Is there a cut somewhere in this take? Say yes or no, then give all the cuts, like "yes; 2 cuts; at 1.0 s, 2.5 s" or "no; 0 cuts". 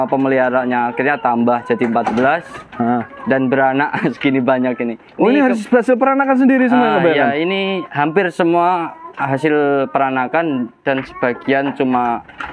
no; 0 cuts